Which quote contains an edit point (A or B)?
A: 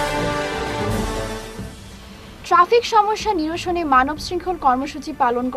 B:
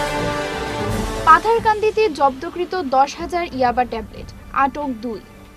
B